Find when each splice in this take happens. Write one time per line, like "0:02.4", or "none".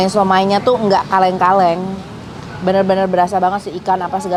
none